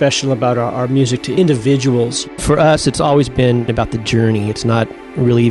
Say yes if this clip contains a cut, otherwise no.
yes